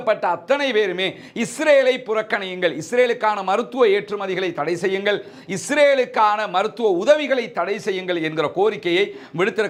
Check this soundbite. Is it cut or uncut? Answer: uncut